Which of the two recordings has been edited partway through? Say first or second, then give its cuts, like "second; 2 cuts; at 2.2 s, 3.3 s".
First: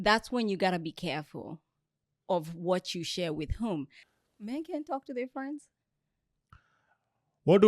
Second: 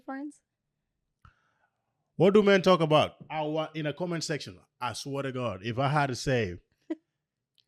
first; 1 cut; at 4.0 s